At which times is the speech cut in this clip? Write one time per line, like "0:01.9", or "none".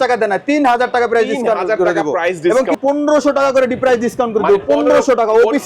0:02.7